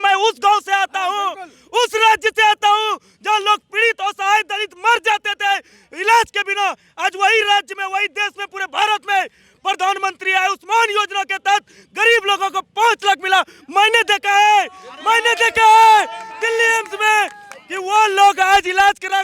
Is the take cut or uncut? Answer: uncut